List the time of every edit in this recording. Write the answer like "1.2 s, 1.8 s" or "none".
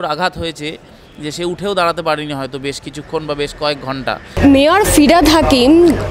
4.3 s